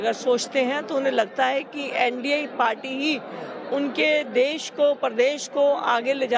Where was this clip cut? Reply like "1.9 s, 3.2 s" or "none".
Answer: none